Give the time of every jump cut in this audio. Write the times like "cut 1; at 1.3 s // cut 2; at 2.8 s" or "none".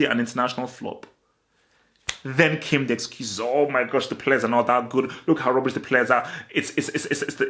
none